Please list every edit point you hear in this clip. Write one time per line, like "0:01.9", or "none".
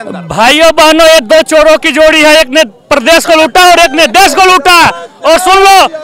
none